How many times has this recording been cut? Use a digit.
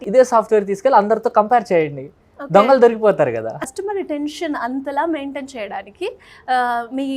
1